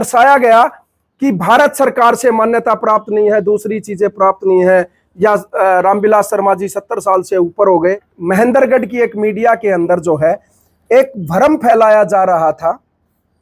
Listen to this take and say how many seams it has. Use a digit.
1